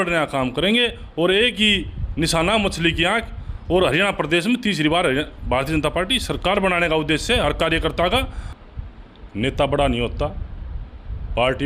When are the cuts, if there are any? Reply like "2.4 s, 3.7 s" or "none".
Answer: 8.4 s